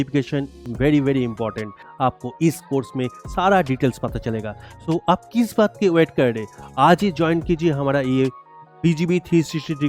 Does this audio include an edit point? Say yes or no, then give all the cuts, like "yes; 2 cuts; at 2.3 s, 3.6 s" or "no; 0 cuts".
yes; 1 cut; at 1.8 s